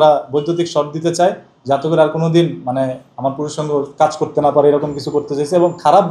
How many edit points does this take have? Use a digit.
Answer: 0